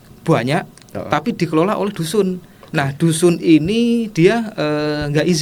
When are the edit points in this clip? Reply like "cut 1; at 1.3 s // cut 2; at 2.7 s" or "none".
none